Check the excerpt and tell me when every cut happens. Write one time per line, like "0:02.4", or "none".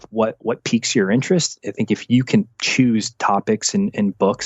none